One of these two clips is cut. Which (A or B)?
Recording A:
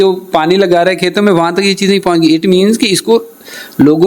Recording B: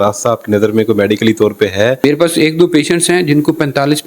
B